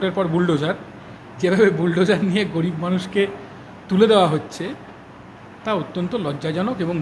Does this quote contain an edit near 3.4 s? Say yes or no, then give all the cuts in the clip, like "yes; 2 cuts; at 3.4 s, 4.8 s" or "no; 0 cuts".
no; 0 cuts